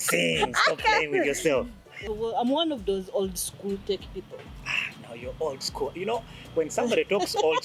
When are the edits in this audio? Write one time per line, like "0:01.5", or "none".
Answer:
0:02.1